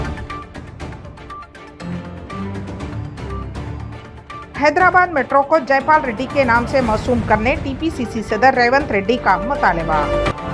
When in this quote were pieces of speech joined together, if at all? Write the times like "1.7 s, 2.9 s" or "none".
3.3 s